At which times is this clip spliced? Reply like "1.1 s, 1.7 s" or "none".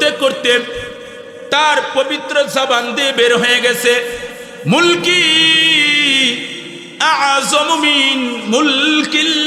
none